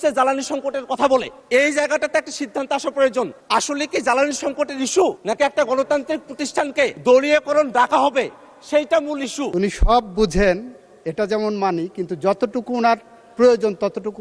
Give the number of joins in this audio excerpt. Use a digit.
5